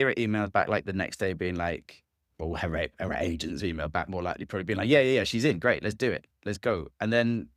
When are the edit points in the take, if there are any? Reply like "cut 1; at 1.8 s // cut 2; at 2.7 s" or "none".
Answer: none